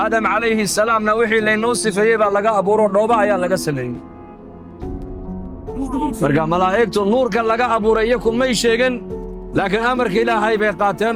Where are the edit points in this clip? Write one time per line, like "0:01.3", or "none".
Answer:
none